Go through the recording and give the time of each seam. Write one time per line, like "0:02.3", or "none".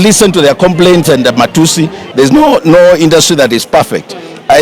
0:02.0